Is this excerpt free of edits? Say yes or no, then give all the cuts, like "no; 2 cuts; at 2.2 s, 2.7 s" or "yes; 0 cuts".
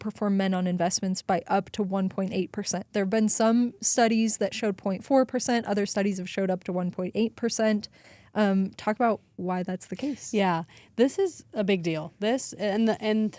yes; 0 cuts